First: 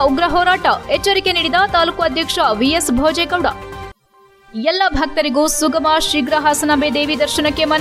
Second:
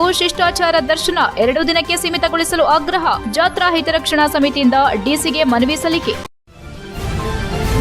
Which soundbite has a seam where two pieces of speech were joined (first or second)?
second